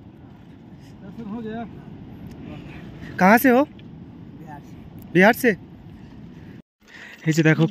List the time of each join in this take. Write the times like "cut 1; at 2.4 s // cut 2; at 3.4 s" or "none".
cut 1; at 6.6 s